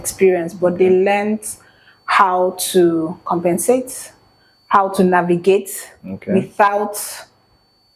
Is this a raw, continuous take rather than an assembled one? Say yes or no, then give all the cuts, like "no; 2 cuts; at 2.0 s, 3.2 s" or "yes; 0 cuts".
yes; 0 cuts